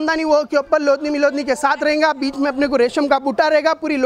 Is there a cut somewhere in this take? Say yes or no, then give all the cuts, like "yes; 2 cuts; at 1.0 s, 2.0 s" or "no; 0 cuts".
no; 0 cuts